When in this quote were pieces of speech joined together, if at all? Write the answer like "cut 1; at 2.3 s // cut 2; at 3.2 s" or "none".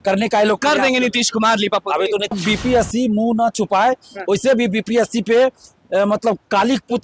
cut 1; at 2.3 s